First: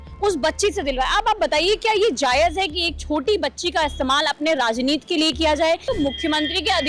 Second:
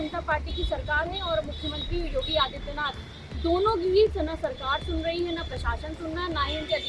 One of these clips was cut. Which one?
first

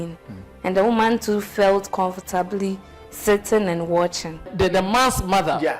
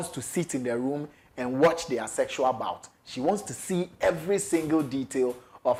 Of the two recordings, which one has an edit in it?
first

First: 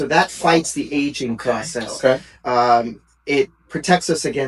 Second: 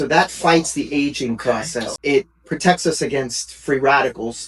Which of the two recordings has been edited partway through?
second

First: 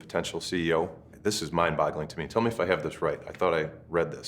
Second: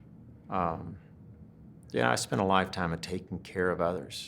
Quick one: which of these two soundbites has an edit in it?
first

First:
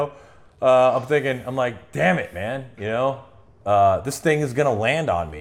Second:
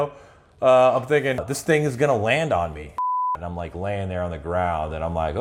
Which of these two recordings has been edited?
second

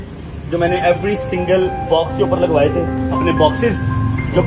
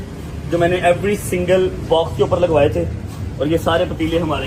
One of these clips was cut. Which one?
first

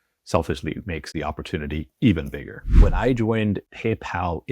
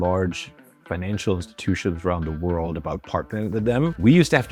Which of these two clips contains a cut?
first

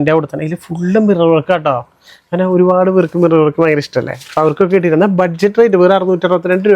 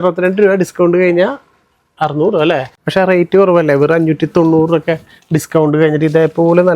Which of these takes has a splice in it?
second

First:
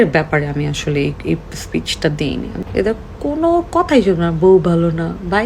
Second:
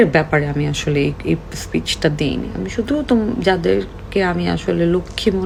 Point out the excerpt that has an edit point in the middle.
first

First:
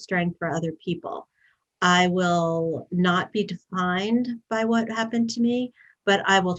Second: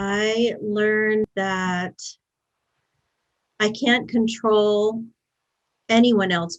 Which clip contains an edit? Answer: second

